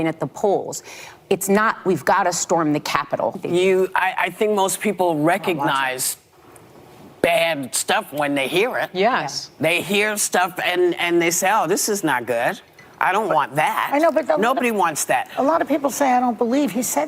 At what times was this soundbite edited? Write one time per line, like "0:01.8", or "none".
0:03.4